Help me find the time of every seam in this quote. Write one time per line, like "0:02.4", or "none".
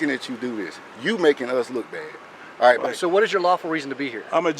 0:02.9